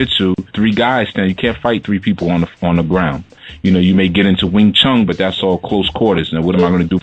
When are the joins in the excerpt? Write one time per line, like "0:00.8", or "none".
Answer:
0:01.6